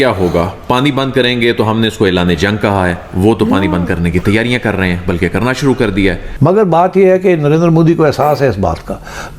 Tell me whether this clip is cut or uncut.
cut